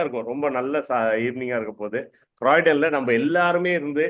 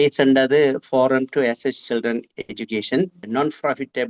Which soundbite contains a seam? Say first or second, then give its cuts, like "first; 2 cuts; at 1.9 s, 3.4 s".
second; 1 cut; at 3.2 s